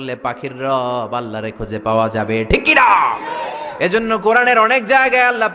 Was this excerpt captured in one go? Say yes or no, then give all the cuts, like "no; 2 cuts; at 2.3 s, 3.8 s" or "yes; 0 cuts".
yes; 0 cuts